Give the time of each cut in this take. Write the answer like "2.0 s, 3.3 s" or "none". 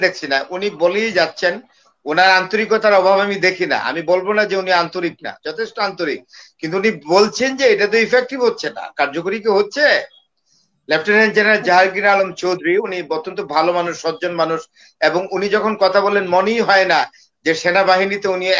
none